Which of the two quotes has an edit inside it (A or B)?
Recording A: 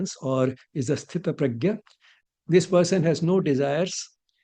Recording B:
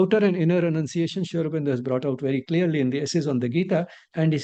A